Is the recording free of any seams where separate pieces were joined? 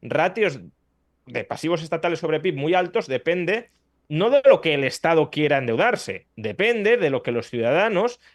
yes; 0 cuts

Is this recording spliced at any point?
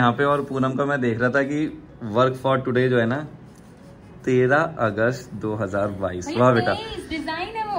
no; 0 cuts

